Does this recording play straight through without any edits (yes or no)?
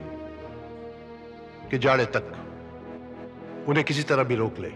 yes